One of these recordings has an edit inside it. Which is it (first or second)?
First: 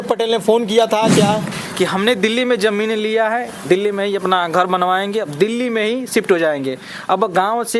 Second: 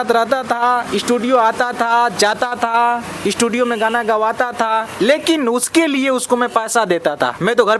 first